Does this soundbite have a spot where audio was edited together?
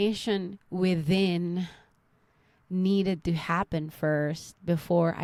no; 0 cuts

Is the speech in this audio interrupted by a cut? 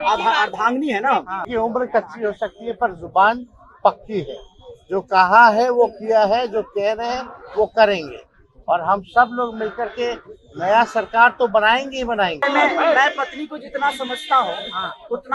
yes; 2 cuts; at 1.4 s, 12.5 s

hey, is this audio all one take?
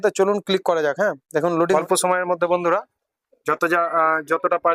no; 1 cut; at 1.7 s

